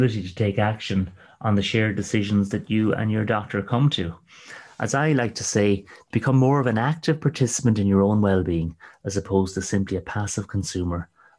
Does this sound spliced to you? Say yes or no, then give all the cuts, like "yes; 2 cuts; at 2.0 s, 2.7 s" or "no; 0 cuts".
no; 0 cuts